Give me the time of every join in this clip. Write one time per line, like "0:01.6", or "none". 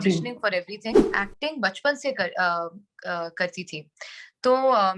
0:01.1